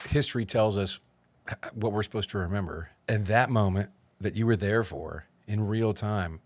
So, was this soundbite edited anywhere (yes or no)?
yes